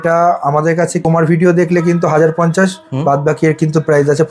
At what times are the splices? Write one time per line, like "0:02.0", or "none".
0:01.0